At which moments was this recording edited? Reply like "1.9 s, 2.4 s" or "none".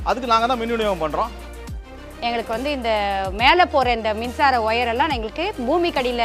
1.6 s